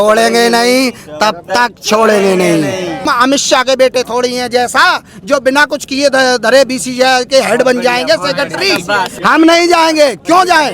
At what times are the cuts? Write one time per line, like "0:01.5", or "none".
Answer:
0:03.1
0:09.1

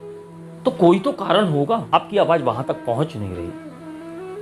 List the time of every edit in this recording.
0:01.9

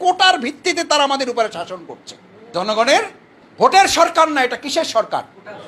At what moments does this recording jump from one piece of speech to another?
none

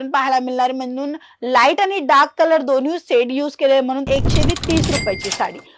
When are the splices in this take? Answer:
0:04.1

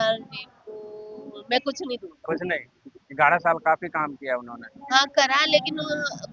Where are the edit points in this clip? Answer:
none

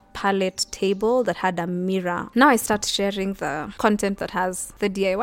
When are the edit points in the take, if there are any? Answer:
0:02.2
0:03.7

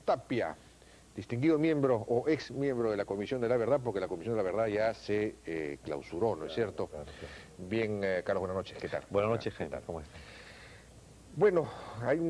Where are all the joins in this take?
none

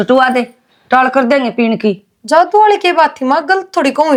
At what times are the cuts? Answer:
none

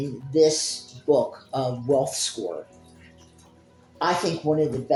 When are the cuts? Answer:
none

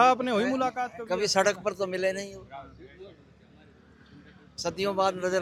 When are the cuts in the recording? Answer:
none

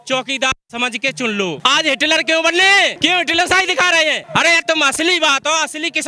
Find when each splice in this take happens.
0:01.6
0:02.9
0:04.2

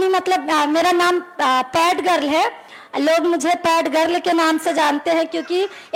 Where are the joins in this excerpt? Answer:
none

